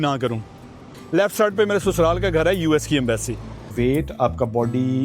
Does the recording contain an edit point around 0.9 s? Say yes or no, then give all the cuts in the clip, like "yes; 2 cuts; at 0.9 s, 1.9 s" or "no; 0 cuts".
yes; 2 cuts; at 0.9 s, 3.7 s